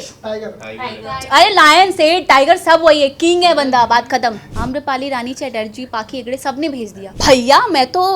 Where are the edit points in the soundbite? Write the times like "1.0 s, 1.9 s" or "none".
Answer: 4.5 s, 7.0 s